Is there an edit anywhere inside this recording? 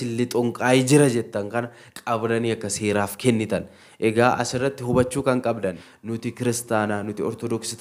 yes; 1 cut; at 5.8 s

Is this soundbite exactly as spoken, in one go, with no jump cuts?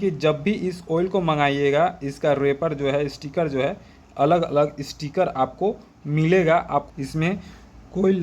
no; 1 cut; at 6.9 s

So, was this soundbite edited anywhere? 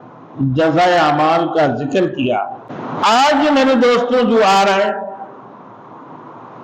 yes; 1 cut; at 2.7 s

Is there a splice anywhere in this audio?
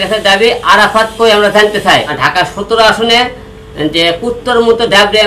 yes; 1 cut; at 2.1 s

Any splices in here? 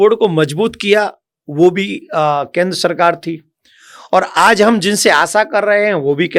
no; 0 cuts

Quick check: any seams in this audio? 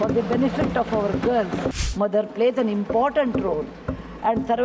yes; 1 cut; at 1.8 s

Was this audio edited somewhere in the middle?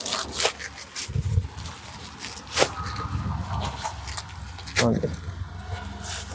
no; 0 cuts

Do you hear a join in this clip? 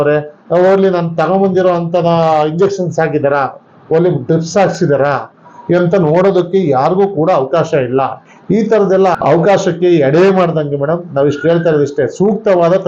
no; 0 cuts

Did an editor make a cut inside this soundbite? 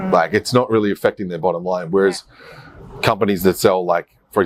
no; 0 cuts

